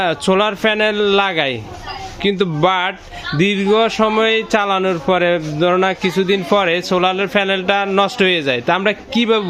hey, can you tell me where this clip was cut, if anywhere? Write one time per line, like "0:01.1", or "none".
none